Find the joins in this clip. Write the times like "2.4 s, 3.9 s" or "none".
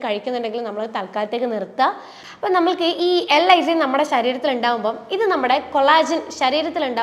2.1 s